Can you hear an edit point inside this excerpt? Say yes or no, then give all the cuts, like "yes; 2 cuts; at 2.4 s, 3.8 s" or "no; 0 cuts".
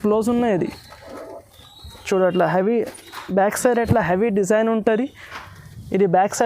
no; 0 cuts